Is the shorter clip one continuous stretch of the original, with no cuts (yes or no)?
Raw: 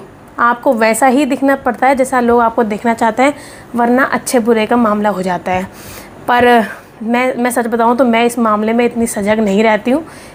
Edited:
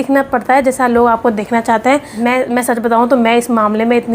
no